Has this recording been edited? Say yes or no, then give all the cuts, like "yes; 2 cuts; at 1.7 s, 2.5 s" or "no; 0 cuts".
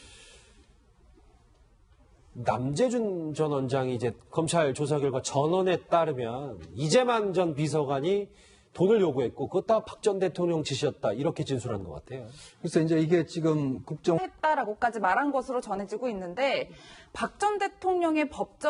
no; 0 cuts